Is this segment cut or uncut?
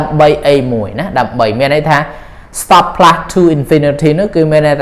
uncut